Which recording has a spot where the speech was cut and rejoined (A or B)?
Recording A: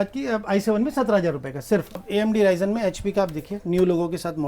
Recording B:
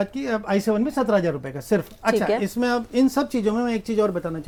A